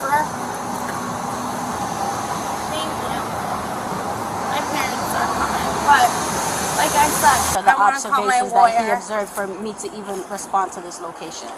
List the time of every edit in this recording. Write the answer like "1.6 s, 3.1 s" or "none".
7.5 s